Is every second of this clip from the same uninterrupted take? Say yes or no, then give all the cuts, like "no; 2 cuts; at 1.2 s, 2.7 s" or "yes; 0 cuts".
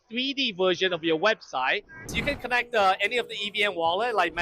no; 1 cut; at 2.0 s